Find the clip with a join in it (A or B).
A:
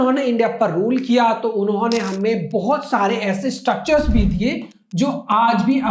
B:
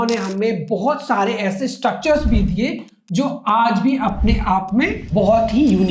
B